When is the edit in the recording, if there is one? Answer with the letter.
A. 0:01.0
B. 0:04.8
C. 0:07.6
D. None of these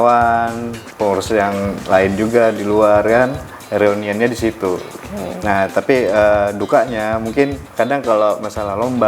C